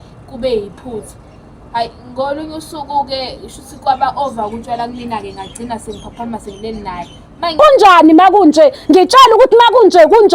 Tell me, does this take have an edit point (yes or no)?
yes